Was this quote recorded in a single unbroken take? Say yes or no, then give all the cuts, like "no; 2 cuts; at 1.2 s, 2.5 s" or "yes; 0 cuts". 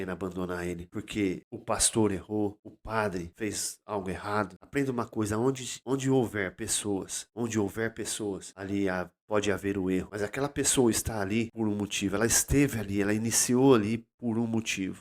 no; 9 cuts; at 0.9 s, 1.5 s, 3.0 s, 4.6 s, 5.7 s, 7.2 s, 8.5 s, 10.1 s, 11.5 s